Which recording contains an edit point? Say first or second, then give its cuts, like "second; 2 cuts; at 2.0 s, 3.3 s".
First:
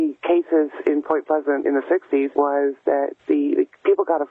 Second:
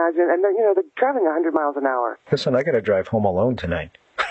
first; 2 cuts; at 2.3 s, 3.2 s